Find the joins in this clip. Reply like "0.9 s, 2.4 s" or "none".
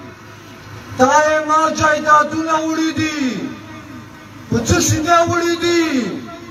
none

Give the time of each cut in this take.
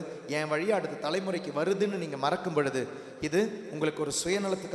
none

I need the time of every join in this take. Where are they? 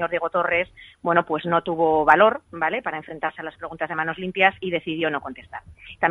3.3 s

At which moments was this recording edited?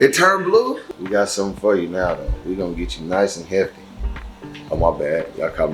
0.9 s

